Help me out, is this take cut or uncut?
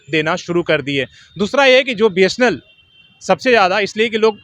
uncut